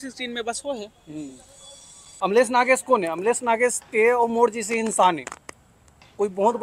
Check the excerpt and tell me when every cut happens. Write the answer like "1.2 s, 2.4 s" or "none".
2.1 s